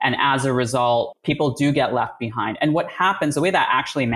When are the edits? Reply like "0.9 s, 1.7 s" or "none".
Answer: 1.1 s